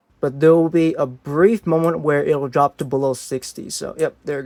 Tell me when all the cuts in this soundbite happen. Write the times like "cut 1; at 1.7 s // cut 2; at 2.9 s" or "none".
none